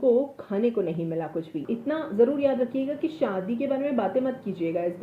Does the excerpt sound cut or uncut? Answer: cut